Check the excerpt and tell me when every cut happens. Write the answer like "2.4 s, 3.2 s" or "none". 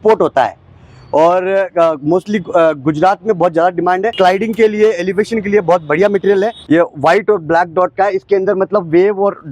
4.1 s, 6.6 s